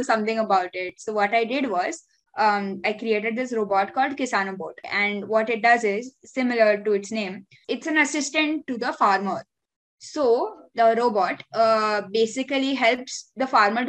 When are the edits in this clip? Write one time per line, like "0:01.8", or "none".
0:07.6
0:08.7

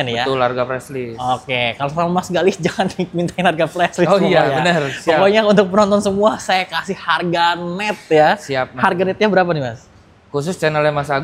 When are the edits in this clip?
none

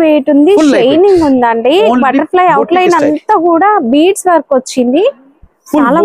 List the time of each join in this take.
none

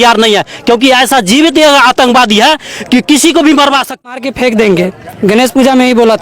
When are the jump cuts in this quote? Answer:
0:04.1

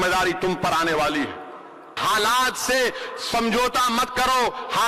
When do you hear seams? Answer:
0:01.9

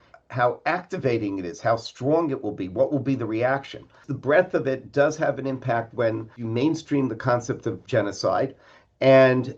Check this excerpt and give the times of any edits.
0:04.1
0:06.4
0:07.8

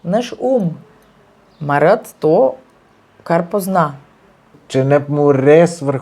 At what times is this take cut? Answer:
0:04.6

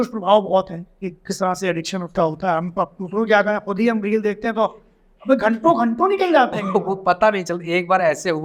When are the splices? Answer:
none

